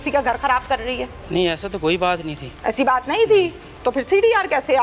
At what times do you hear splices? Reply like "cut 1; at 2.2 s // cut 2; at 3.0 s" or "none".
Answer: cut 1; at 1.1 s